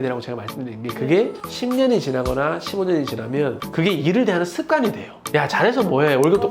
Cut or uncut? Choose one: cut